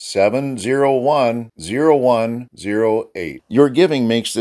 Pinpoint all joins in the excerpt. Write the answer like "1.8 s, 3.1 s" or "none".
none